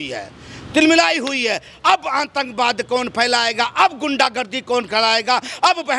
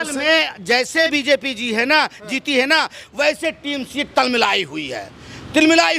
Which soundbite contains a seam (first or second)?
second